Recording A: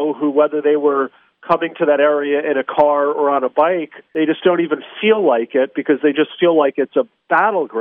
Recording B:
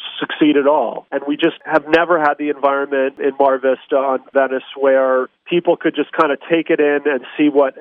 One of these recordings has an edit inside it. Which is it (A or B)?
B